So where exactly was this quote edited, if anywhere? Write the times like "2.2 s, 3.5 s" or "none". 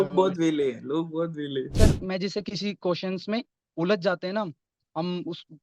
1.7 s